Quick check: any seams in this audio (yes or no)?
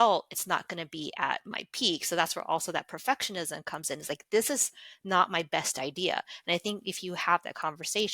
no